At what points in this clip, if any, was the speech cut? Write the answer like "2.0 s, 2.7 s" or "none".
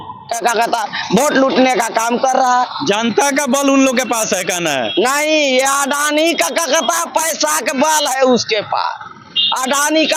none